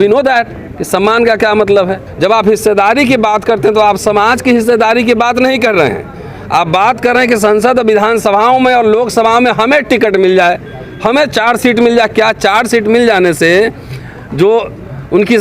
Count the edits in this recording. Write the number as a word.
one